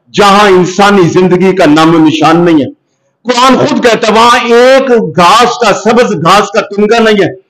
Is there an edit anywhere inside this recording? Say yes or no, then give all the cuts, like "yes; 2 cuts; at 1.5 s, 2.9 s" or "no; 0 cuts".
no; 0 cuts